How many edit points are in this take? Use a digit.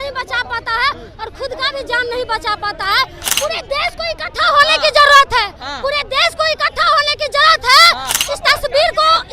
2